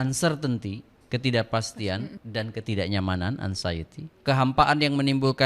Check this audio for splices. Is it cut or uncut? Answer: cut